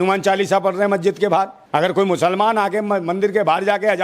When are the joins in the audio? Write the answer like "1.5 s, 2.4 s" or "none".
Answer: 1.6 s